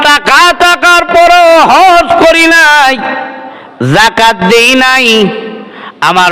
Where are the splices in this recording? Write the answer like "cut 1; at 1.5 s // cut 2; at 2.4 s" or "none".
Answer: none